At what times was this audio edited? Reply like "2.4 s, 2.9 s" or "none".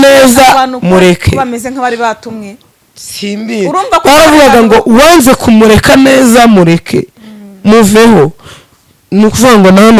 none